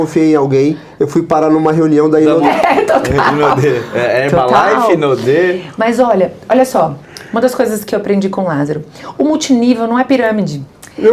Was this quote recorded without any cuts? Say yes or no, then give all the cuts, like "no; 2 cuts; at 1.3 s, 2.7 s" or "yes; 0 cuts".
yes; 0 cuts